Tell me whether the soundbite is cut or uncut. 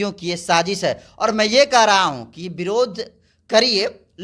uncut